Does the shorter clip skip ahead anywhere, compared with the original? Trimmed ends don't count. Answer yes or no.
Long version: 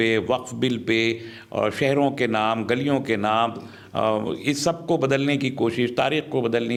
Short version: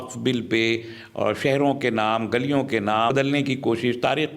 yes